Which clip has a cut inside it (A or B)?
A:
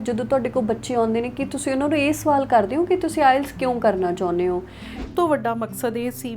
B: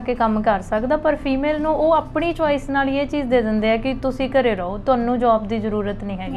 A